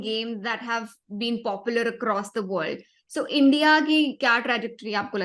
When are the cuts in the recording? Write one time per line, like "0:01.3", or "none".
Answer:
0:04.2